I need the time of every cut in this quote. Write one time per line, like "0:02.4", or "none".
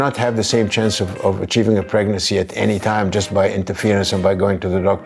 none